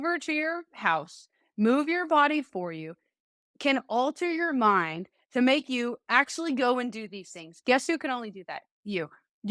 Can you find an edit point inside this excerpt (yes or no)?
no